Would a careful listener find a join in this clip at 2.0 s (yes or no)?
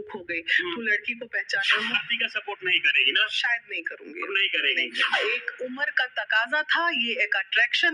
yes